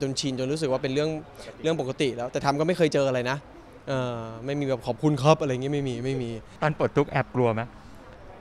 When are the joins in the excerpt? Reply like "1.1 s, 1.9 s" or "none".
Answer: 6.4 s